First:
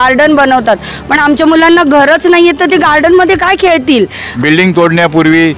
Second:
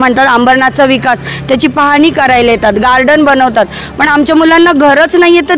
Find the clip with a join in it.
first; 1 cut; at 4.2 s

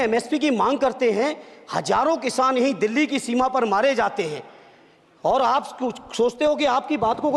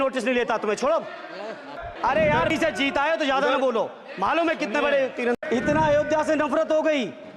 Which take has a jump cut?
second; 2 cuts; at 1.9 s, 5.4 s

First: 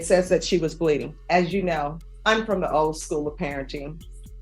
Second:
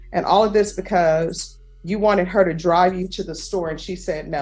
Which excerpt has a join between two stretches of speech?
first; 2 cuts; at 1.1 s, 2.1 s

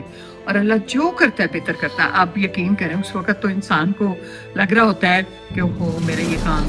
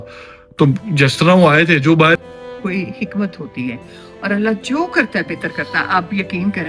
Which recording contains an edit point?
second; 1 cut; at 2.2 s

